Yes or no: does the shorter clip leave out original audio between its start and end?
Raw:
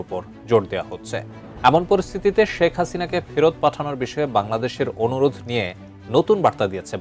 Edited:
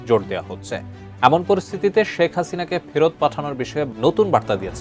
yes